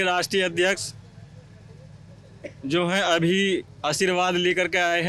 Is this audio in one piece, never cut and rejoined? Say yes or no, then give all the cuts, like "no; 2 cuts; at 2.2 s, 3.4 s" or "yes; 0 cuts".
yes; 0 cuts